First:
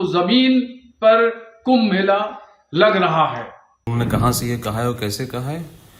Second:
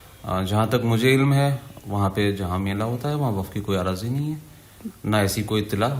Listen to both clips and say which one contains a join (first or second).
first